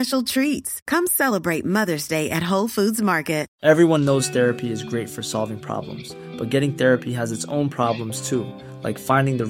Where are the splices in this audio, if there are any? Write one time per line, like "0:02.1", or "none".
0:03.5